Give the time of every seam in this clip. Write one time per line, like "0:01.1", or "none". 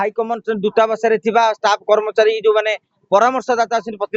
none